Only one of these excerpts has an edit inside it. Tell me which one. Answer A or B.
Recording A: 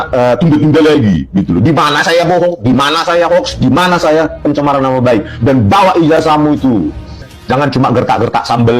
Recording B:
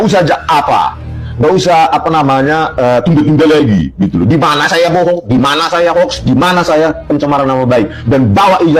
A